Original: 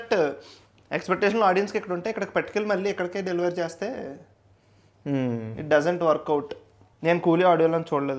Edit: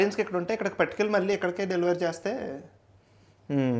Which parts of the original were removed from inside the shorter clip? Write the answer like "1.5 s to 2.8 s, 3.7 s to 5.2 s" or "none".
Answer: none